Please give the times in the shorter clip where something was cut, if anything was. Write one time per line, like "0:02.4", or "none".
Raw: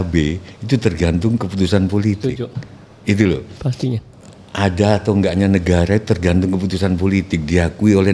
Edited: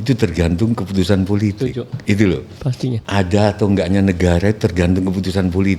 0:01.9
0:03.0